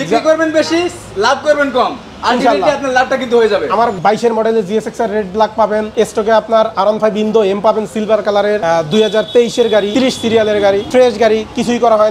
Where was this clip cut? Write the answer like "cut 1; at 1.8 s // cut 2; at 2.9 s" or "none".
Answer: cut 1; at 4.0 s // cut 2; at 5.9 s // cut 3; at 8.6 s // cut 4; at 9.9 s // cut 5; at 10.8 s